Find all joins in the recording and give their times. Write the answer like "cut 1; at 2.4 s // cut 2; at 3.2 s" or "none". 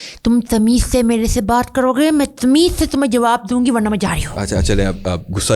none